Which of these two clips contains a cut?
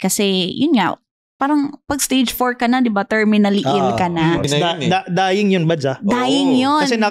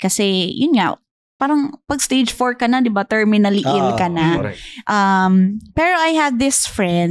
first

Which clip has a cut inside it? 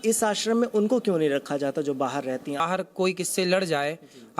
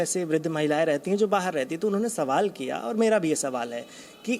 first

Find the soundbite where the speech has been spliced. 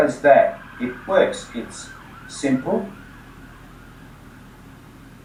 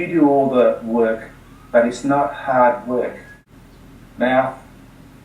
second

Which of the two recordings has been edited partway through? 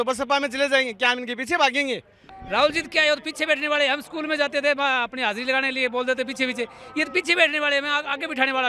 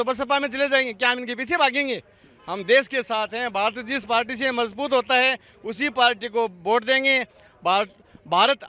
first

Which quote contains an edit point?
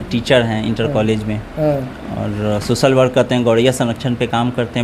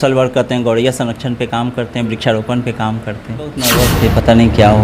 second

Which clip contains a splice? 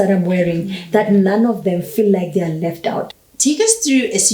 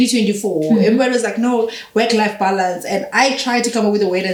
first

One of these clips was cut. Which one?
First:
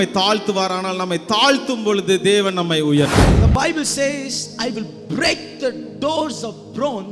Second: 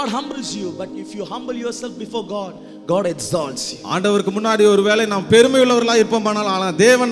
first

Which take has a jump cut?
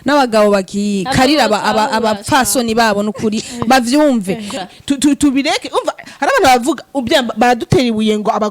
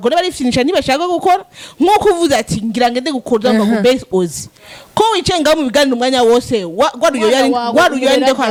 first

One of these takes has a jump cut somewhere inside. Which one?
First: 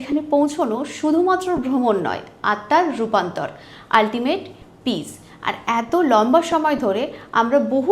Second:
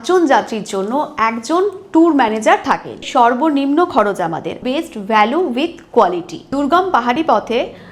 second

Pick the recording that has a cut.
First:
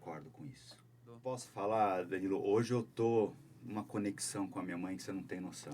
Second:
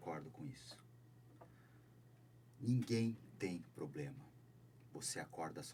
first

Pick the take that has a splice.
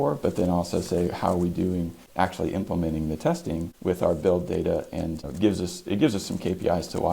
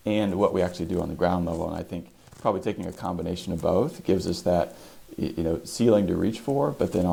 first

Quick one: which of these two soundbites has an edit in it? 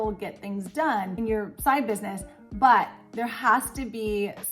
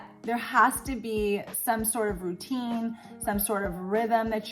first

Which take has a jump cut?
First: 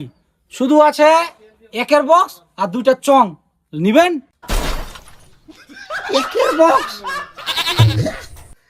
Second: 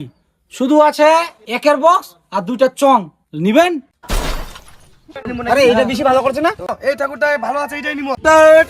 second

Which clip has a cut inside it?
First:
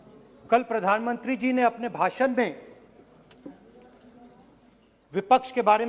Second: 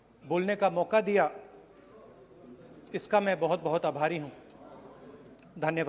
first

